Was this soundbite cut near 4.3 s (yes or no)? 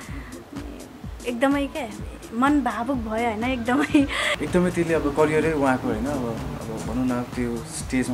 yes